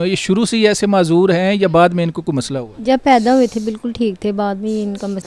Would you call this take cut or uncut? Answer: uncut